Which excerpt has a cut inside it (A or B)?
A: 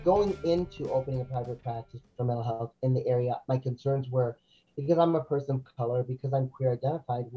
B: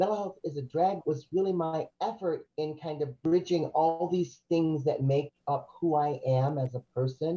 B